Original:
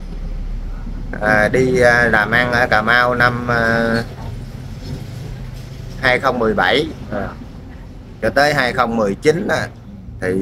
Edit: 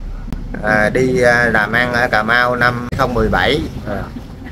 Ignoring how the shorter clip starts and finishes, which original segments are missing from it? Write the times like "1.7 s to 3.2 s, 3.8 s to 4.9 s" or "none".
3.5 s to 6.2 s